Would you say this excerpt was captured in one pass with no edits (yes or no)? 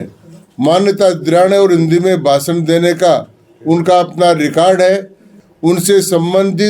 no